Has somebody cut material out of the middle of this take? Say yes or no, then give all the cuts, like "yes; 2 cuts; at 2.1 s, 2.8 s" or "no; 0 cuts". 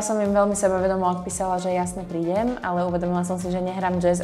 no; 0 cuts